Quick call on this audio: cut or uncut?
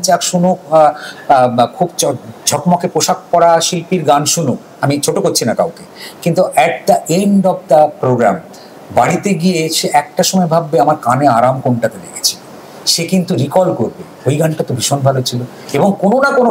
uncut